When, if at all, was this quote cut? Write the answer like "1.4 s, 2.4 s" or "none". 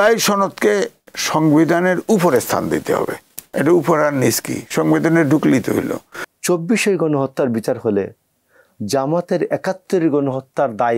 6.3 s